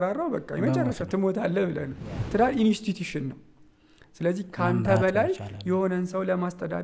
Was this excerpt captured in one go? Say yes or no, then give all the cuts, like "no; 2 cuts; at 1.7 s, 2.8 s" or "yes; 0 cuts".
no; 1 cut; at 2.2 s